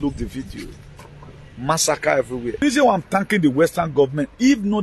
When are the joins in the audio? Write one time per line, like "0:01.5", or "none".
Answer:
0:02.6